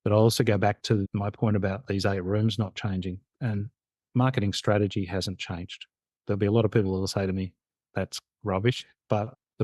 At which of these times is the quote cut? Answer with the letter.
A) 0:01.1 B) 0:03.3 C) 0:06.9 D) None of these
A